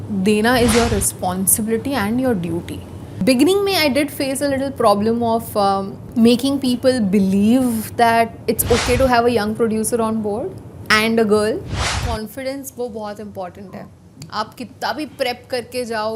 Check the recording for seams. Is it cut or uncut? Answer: cut